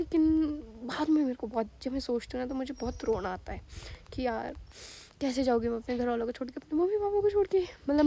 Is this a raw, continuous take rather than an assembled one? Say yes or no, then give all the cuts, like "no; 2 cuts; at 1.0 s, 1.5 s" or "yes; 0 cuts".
yes; 0 cuts